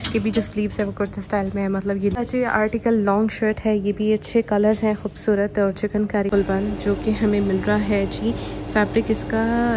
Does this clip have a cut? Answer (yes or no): yes